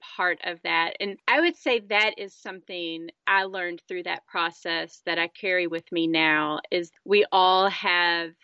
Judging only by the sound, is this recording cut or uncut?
cut